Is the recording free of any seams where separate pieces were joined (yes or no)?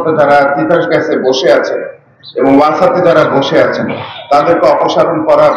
yes